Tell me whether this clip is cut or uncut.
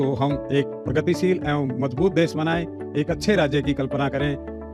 uncut